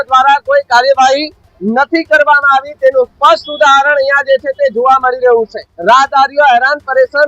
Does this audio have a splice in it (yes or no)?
yes